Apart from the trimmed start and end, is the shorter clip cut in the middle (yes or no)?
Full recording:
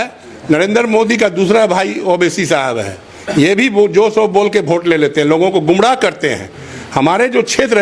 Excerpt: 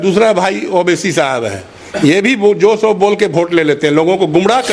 no